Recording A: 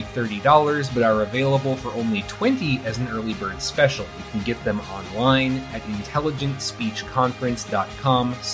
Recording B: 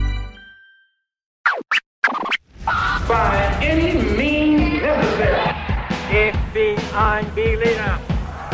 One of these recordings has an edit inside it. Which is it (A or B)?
B